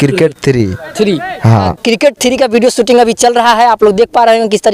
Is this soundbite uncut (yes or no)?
no